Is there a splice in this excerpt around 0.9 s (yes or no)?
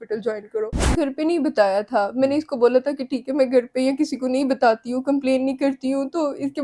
yes